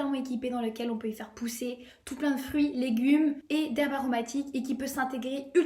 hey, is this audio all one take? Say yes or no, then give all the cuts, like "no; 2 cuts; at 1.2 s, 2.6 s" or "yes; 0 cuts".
yes; 0 cuts